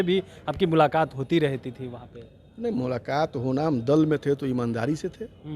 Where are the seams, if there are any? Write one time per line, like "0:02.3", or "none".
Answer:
none

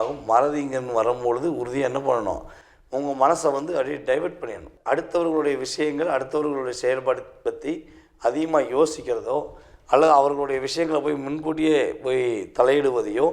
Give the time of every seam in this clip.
0:04.7

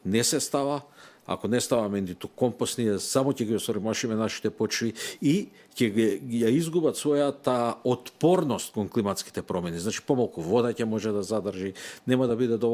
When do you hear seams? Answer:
none

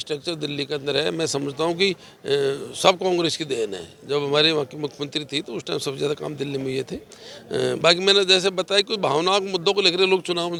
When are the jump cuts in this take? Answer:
none

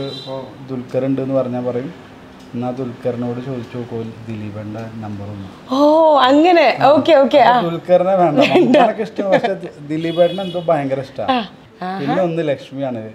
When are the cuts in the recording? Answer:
0:11.5

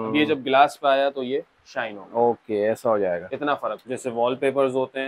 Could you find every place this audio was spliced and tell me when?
0:03.8

